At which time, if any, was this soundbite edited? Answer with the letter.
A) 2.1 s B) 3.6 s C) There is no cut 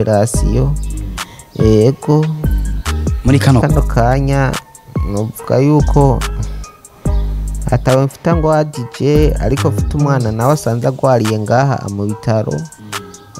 B